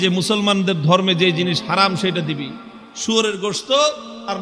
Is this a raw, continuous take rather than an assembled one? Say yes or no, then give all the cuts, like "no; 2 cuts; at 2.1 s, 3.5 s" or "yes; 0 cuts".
yes; 0 cuts